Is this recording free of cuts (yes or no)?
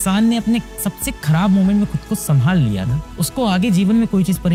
yes